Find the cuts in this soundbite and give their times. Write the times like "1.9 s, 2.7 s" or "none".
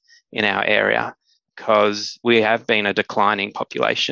2.2 s